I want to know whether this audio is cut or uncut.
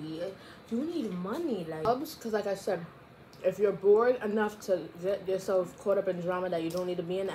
cut